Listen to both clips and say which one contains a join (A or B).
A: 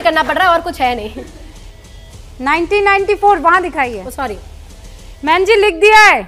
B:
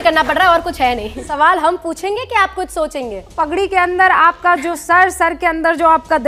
B